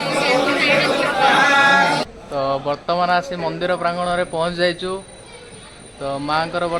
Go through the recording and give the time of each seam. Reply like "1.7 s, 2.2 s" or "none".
2.0 s